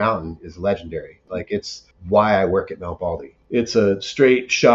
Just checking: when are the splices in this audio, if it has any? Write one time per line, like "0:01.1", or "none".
0:01.2
0:03.3